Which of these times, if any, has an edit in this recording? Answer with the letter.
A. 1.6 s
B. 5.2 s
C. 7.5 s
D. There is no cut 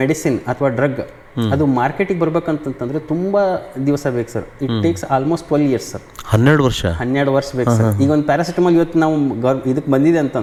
D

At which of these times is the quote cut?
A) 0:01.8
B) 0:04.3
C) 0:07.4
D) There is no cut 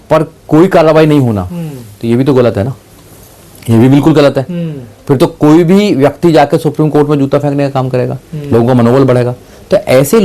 D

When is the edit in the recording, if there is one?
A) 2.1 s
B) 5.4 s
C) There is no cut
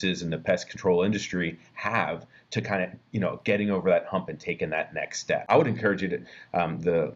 B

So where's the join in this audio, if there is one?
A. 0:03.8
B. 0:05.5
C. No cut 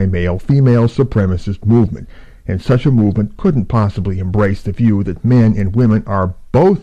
A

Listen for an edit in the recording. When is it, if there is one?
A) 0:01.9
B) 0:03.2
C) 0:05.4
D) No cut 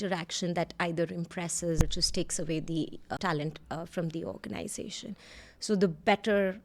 B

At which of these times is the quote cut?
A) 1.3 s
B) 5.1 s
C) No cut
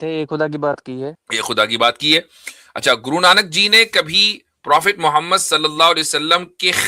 A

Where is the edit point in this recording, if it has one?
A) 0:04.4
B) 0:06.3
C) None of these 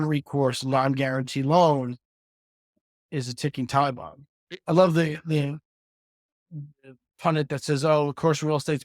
A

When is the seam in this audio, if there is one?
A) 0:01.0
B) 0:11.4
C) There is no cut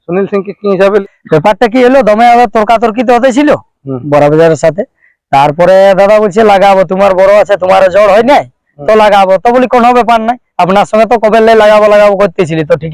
A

